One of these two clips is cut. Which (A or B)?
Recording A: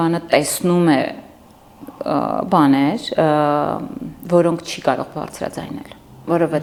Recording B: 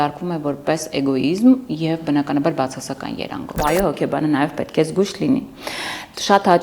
B